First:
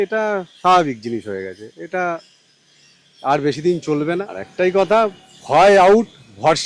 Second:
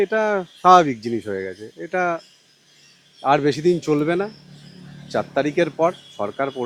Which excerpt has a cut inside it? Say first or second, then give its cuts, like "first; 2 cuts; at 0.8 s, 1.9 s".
first; 1 cut; at 4.4 s